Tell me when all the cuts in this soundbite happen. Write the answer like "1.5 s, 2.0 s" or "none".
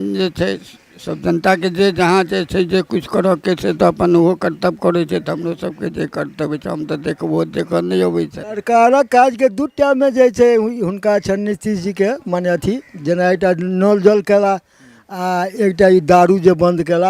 8.5 s